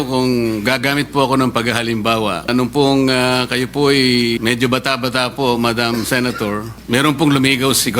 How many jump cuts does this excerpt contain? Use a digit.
3